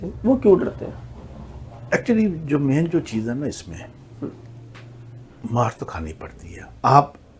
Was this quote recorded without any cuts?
yes; 0 cuts

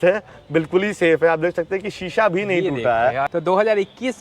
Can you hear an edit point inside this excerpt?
yes; 1 cut; at 3.3 s

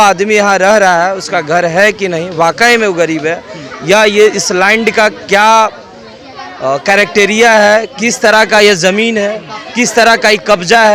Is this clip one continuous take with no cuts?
yes; 0 cuts

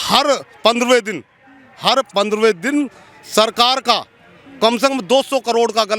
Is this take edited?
no; 0 cuts

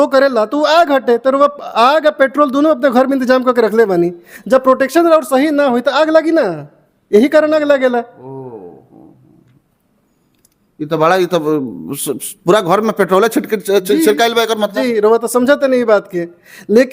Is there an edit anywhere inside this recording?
no; 0 cuts

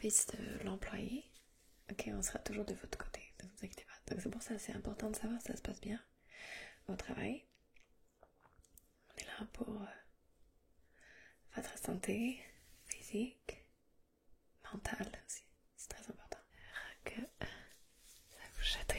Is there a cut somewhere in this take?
yes; 1 cut; at 16.8 s

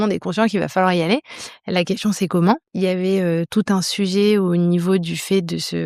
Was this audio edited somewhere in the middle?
yes; 1 cut; at 2.7 s

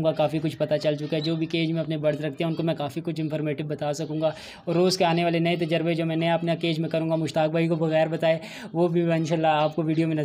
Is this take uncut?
yes; 0 cuts

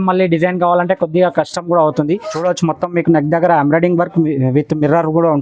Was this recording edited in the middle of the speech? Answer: yes; 1 cut; at 2.3 s

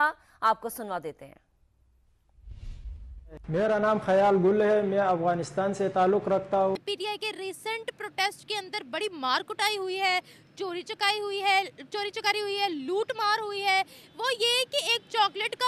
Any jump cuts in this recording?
yes; 1 cut; at 6.8 s

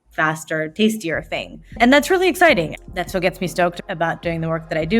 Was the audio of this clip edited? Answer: yes; 2 cuts; at 2.7 s, 3.8 s

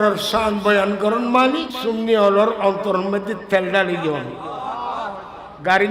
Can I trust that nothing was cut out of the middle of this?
no; 1 cut; at 1.7 s

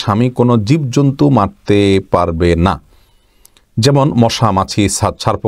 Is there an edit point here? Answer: no; 0 cuts

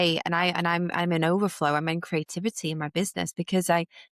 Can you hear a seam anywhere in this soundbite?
no; 0 cuts

